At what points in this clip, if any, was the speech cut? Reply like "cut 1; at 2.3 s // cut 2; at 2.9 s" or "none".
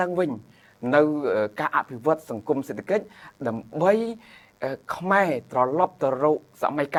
none